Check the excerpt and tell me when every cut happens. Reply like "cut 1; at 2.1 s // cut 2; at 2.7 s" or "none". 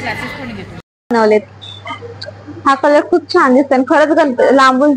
cut 1; at 1.1 s